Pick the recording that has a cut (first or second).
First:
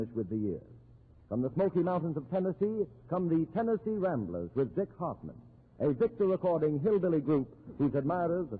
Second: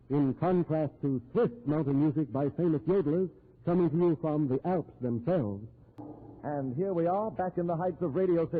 second